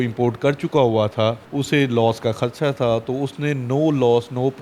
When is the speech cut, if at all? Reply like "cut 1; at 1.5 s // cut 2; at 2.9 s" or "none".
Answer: cut 1; at 1.5 s